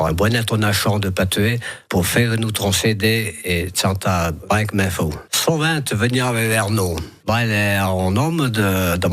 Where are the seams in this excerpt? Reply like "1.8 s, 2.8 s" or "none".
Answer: 5.3 s, 7.1 s